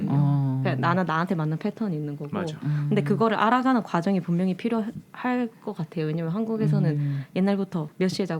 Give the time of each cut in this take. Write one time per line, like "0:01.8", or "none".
none